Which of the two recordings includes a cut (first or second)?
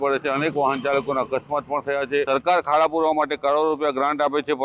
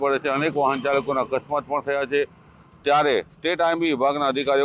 first